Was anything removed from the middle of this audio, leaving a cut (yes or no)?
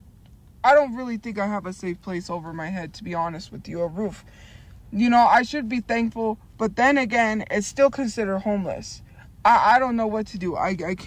no